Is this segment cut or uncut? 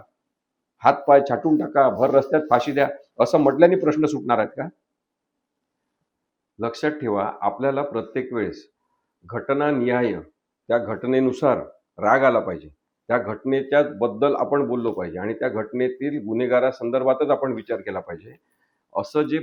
uncut